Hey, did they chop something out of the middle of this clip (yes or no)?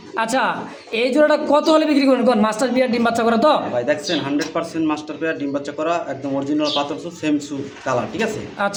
no